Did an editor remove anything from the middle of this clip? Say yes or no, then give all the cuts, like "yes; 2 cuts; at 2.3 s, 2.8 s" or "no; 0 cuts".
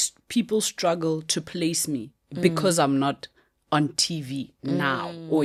no; 0 cuts